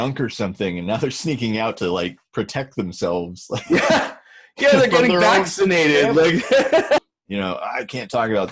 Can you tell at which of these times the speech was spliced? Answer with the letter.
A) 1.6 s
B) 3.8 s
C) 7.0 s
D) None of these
C